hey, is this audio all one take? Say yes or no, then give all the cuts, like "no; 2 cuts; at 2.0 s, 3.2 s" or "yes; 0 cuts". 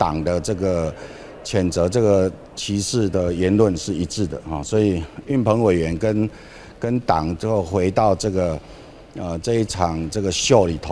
yes; 0 cuts